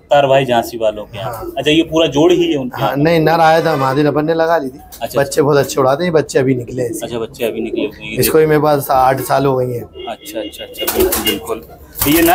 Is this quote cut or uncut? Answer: uncut